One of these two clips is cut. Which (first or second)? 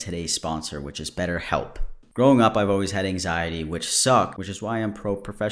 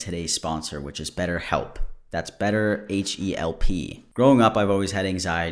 first